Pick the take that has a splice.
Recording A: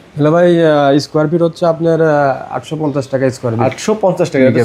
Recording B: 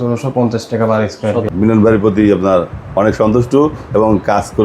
B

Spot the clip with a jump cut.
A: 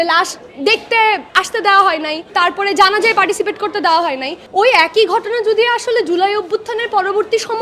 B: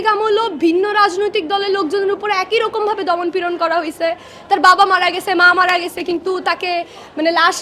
A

